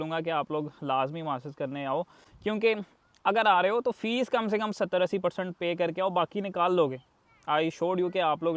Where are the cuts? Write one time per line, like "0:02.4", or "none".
none